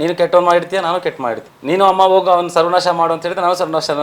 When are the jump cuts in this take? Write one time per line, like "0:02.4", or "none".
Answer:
0:01.5